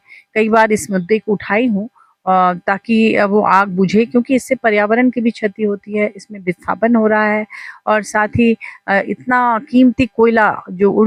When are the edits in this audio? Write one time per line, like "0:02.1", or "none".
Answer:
none